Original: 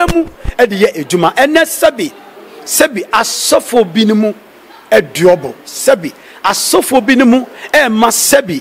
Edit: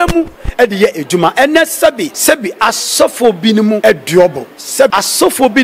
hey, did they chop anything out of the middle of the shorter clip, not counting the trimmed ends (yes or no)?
yes